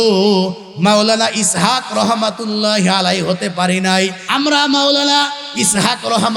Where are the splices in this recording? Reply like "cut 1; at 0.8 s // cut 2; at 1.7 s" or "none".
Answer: cut 1; at 4.2 s

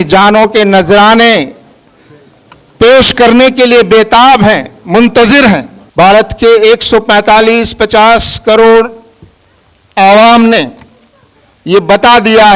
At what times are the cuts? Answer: cut 1; at 5.8 s

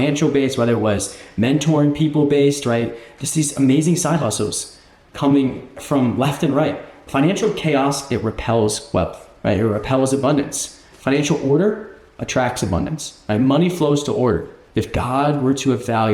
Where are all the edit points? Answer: cut 1; at 7.0 s // cut 2; at 9.2 s // cut 3; at 14.6 s

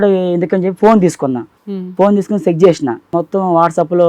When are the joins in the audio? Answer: cut 1; at 1.5 s // cut 2; at 3.1 s

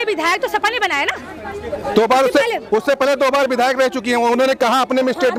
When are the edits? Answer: none

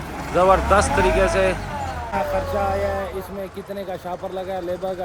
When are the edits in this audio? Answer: cut 1; at 2.1 s

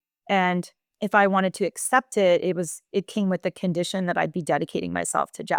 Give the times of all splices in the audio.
none

